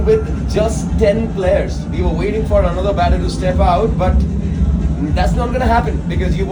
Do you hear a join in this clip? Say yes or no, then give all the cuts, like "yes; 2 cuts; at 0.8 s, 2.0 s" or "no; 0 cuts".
no; 0 cuts